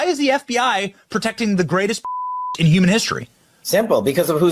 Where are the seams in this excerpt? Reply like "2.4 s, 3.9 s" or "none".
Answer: 2.5 s